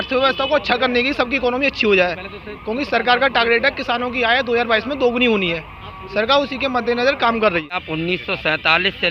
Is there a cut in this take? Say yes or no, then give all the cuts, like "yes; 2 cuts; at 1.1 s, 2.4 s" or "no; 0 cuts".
yes; 1 cut; at 7.8 s